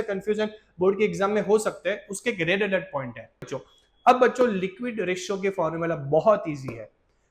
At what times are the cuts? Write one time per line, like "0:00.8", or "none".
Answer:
0:03.5